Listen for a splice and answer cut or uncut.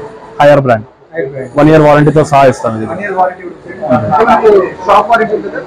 uncut